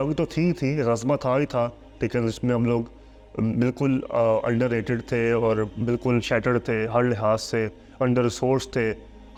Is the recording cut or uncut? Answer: uncut